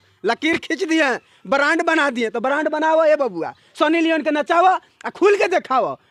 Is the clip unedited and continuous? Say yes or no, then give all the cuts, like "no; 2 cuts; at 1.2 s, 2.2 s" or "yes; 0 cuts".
yes; 0 cuts